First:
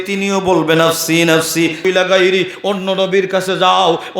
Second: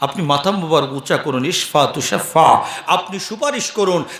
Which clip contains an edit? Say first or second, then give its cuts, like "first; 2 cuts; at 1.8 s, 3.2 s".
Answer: first; 1 cut; at 1.8 s